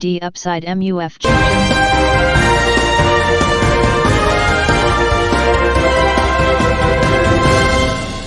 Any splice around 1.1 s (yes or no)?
no